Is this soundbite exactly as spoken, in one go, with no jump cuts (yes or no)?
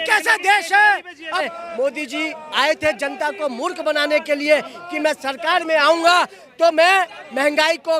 no